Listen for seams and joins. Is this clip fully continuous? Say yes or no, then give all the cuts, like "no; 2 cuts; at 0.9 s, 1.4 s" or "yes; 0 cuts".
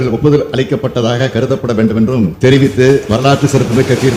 yes; 0 cuts